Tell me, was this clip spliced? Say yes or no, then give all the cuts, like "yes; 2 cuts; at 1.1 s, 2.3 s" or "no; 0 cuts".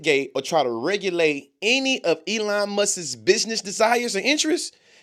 no; 0 cuts